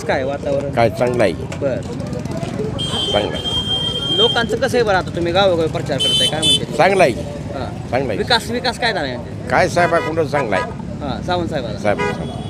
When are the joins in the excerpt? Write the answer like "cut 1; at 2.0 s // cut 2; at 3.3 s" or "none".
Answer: none

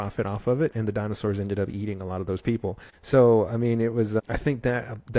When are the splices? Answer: cut 1; at 2.9 s // cut 2; at 4.2 s

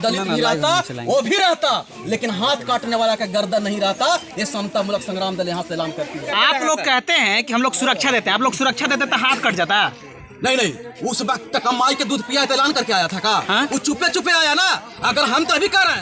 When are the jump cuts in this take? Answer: cut 1; at 6.3 s

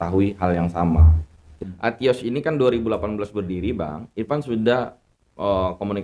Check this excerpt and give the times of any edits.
cut 1; at 1.5 s

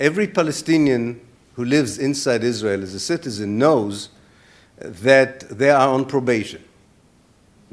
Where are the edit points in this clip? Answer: none

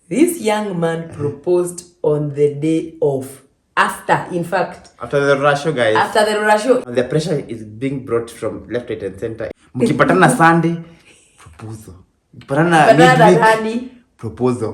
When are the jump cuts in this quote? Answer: cut 1; at 6.8 s // cut 2; at 9.5 s

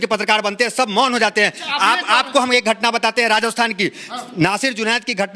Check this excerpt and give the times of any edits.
none

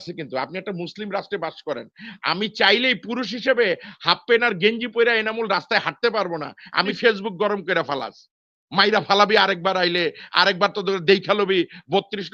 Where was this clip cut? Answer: cut 1; at 6.9 s

